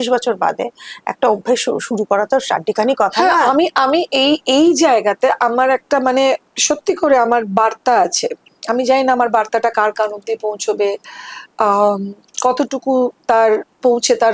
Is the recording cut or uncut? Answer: uncut